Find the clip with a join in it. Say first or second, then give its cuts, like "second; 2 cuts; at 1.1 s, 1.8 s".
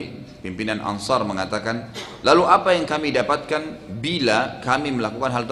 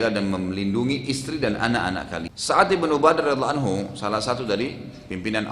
second; 1 cut; at 2.3 s